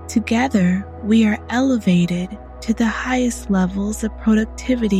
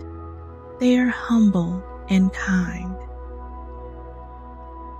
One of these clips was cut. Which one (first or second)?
second